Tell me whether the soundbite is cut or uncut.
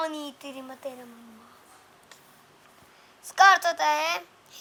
uncut